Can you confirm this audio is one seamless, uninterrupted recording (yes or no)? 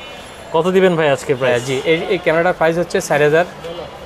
yes